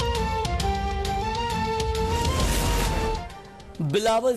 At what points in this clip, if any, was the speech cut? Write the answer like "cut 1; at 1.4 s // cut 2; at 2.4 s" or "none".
cut 1; at 0.8 s // cut 2; at 2.1 s